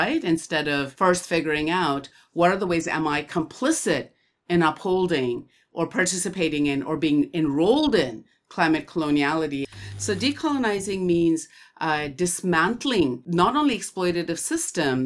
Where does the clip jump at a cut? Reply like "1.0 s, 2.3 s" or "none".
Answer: 9.7 s